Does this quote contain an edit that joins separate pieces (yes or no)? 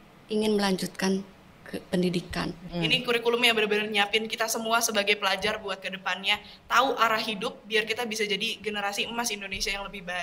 yes